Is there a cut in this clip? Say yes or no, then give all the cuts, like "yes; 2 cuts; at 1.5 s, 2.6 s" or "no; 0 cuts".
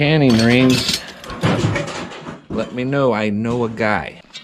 no; 0 cuts